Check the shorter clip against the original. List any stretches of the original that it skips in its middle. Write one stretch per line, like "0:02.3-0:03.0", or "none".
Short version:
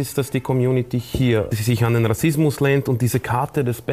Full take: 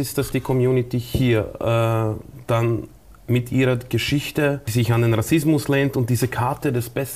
0:01.6-0:04.6